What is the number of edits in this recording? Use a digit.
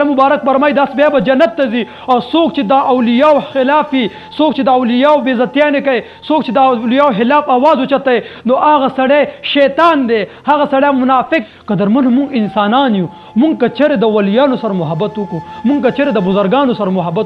1